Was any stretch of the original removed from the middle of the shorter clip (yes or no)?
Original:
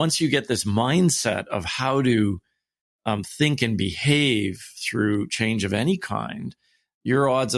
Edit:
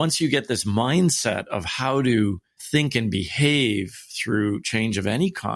yes